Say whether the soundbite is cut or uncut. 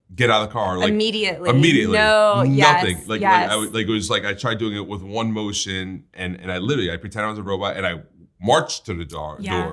uncut